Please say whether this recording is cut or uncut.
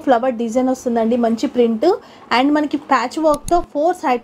uncut